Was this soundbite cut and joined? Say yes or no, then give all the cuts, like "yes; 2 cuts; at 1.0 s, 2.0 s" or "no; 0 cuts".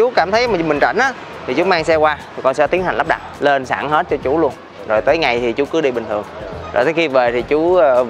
no; 0 cuts